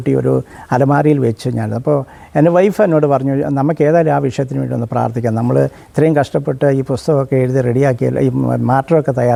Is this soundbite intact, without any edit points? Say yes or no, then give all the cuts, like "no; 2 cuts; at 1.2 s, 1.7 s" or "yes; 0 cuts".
yes; 0 cuts